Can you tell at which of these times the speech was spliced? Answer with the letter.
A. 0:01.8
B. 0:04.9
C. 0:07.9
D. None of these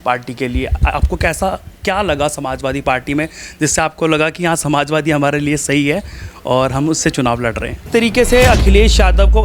C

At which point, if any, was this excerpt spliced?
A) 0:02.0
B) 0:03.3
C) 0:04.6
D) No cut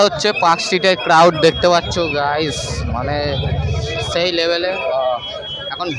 D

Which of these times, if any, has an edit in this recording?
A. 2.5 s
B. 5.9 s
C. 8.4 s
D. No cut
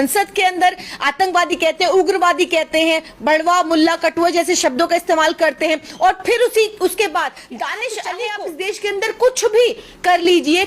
C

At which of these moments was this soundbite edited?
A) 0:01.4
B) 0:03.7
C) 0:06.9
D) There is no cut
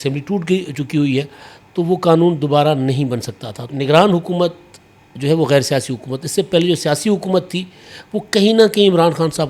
B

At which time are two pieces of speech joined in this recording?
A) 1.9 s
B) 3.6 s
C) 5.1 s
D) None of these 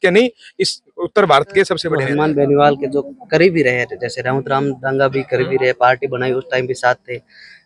A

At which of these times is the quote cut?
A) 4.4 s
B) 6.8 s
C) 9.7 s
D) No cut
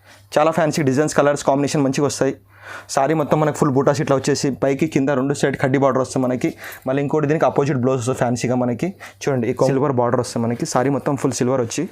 C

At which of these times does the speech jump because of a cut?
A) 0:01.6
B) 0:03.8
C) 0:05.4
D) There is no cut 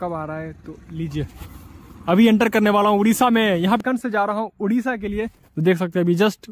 B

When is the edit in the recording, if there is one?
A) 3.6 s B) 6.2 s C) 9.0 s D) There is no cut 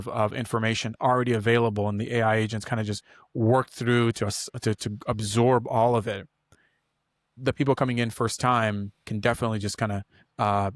D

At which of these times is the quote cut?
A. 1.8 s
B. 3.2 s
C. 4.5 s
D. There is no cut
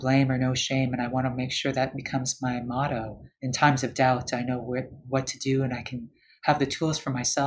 B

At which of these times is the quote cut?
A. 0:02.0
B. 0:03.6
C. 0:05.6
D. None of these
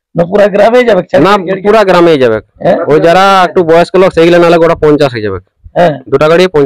D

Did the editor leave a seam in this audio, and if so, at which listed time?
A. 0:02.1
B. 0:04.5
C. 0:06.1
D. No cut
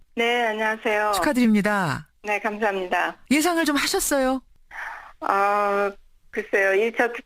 A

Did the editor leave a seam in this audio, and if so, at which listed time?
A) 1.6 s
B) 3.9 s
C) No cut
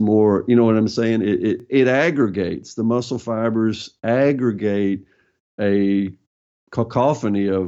A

